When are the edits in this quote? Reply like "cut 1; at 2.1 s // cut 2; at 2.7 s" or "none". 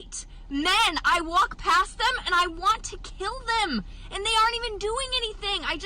cut 1; at 1.3 s // cut 2; at 3.9 s